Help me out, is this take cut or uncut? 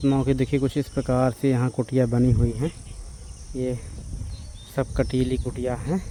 uncut